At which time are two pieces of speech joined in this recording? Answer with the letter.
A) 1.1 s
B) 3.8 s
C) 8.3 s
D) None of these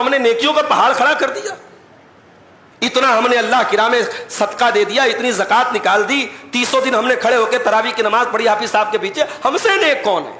D